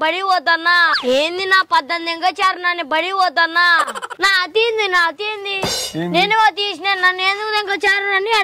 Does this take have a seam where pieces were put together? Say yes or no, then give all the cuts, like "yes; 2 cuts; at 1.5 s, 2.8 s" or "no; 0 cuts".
yes; 2 cuts; at 0.9 s, 3.9 s